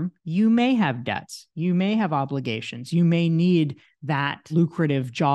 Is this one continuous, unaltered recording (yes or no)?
no